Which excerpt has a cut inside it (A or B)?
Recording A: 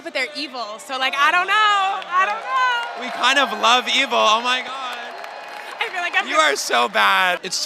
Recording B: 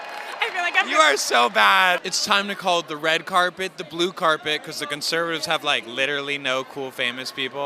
A